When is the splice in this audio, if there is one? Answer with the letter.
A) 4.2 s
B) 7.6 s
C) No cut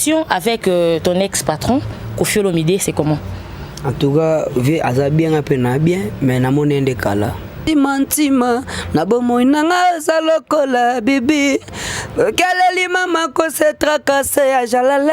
B